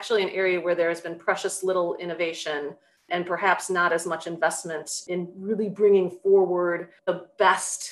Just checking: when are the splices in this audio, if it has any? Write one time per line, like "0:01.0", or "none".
0:03.1
0:05.0
0:06.9